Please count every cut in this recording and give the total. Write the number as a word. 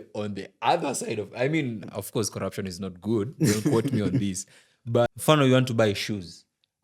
one